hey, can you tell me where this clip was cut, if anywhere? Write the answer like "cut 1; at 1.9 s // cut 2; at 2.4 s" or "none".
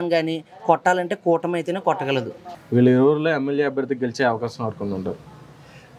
none